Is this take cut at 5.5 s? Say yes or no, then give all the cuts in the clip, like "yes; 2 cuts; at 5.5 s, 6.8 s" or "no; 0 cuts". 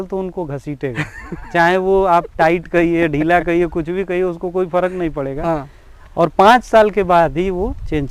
no; 0 cuts